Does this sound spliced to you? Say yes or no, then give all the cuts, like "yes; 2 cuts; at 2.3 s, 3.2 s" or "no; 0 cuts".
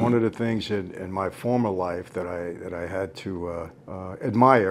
no; 0 cuts